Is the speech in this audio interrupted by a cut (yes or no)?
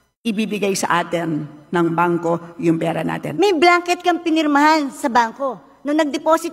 yes